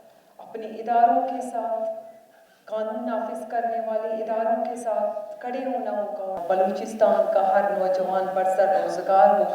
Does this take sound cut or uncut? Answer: cut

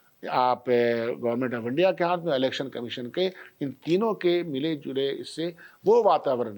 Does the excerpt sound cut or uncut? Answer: uncut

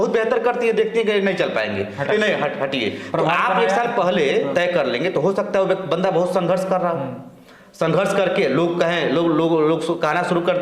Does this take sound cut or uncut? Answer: uncut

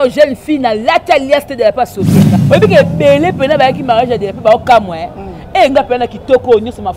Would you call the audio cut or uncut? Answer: cut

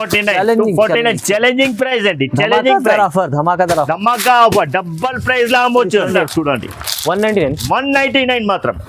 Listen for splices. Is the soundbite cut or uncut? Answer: cut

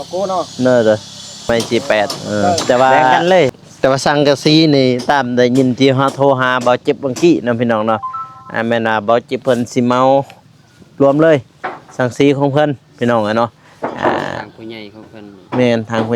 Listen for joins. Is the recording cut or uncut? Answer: cut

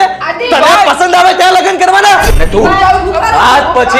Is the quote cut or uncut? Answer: cut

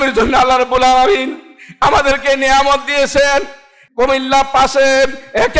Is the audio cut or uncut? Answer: cut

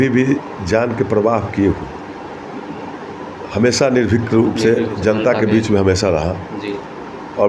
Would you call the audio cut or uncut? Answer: uncut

